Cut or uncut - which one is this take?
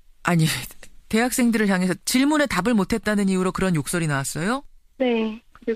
uncut